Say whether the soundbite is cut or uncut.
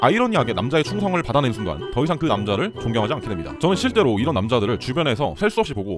cut